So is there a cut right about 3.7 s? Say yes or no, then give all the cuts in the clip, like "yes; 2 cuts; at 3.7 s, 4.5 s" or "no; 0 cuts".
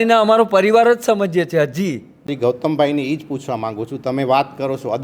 no; 1 cut; at 2.3 s